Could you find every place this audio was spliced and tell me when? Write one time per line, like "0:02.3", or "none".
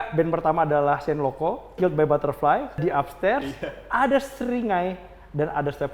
0:01.8
0:02.8

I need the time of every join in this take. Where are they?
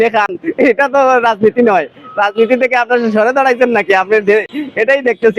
none

